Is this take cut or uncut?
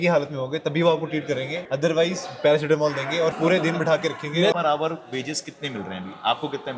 cut